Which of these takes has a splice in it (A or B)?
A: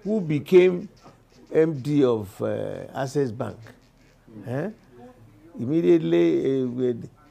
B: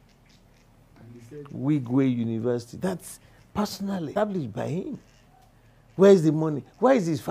B